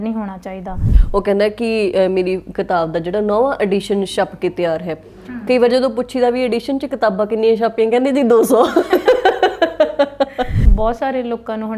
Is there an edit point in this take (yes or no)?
yes